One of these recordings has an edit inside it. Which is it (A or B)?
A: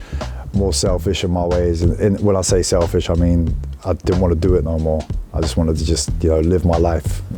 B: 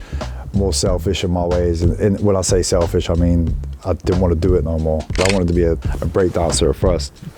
B